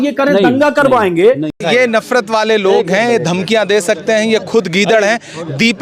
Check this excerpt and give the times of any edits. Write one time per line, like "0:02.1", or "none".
0:01.5